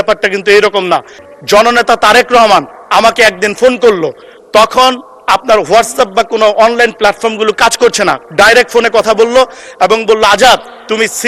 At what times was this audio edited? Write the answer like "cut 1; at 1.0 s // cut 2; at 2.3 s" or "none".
cut 1; at 1.3 s